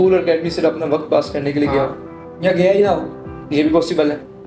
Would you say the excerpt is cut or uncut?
uncut